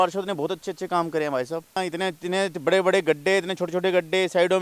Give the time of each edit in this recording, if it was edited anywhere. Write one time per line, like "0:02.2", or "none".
0:01.8

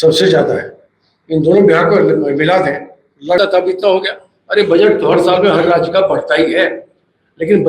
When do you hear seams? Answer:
0:03.4

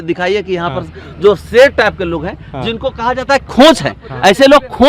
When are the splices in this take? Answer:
none

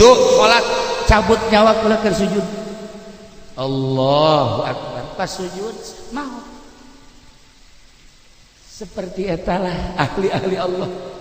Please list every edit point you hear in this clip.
none

